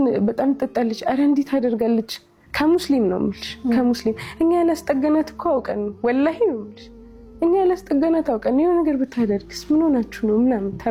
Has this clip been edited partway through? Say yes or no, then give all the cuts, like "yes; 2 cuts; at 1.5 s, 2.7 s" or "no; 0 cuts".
no; 0 cuts